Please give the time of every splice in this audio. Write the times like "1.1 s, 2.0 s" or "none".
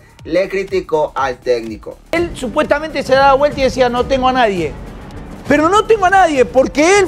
2.1 s